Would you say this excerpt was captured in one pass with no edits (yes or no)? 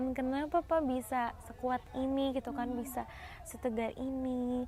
yes